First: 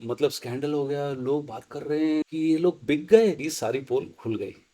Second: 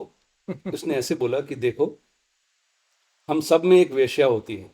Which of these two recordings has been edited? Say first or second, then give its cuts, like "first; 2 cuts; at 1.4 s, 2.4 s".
first; 2 cuts; at 2.3 s, 3.5 s